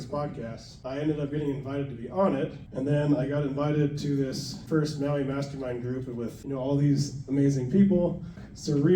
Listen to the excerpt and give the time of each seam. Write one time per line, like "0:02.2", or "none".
0:04.6